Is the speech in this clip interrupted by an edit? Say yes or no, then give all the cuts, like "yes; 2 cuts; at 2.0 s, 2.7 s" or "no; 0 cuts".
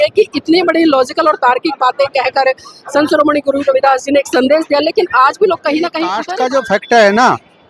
yes; 1 cut; at 6.3 s